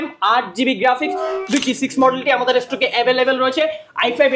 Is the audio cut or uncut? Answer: cut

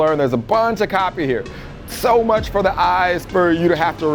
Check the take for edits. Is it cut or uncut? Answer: uncut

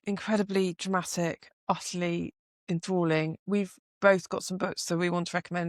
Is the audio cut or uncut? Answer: uncut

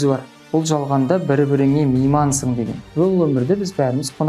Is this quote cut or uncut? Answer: cut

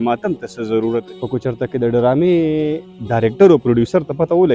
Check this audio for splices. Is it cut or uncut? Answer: cut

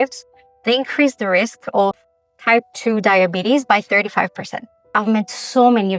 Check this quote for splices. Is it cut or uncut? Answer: cut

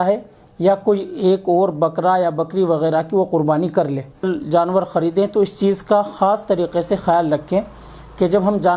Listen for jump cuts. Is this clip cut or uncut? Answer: cut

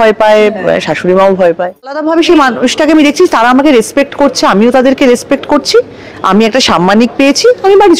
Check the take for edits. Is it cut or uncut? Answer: cut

